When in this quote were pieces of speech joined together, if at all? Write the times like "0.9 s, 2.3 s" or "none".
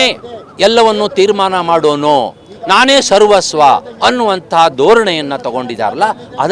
none